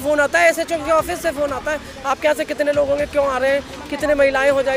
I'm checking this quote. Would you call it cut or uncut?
uncut